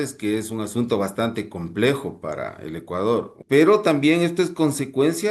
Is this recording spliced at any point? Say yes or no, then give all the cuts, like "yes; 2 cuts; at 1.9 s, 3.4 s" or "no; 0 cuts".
yes; 1 cut; at 3.3 s